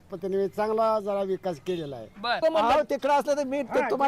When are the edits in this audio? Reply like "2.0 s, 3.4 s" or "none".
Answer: 2.4 s